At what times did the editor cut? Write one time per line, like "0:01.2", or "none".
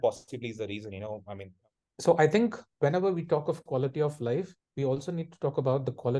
0:01.5

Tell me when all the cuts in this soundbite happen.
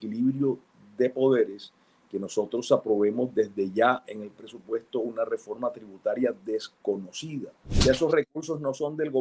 0:07.6

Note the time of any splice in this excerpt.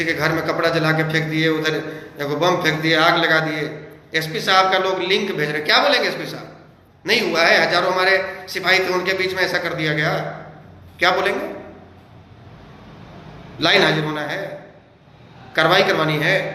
none

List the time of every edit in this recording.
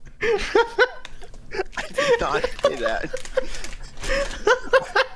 none

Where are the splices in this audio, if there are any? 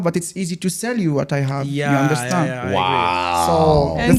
none

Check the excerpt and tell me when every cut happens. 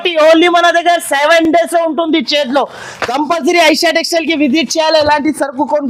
none

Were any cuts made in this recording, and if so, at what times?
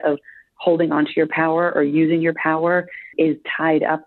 0:03.0

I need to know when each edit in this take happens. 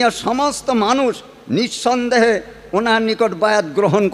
none

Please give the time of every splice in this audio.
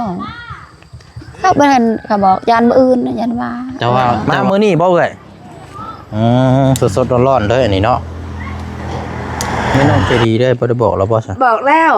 0:04.2
0:09.8

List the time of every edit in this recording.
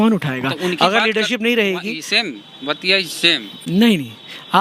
none

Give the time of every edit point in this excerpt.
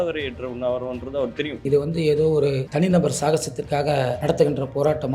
0:02.6
0:04.2

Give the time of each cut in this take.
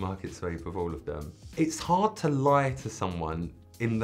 0:01.3

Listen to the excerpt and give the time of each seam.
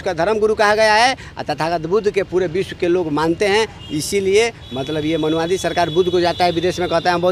none

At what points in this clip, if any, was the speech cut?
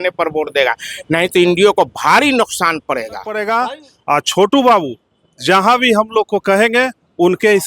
0:03.4

